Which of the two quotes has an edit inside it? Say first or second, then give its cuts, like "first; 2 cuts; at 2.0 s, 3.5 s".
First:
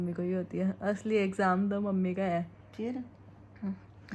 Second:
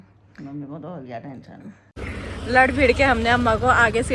second; 1 cut; at 2.0 s